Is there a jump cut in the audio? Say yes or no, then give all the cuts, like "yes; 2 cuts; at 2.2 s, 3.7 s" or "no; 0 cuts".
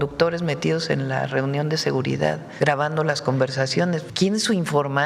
yes; 2 cuts; at 2.5 s, 4.1 s